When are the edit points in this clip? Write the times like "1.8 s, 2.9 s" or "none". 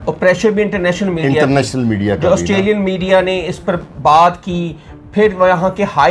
none